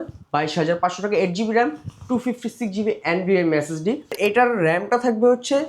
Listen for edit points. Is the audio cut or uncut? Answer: cut